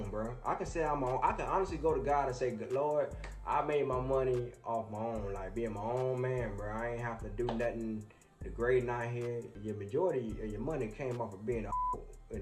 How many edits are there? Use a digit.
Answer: 1